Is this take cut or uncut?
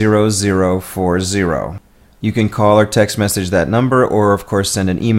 cut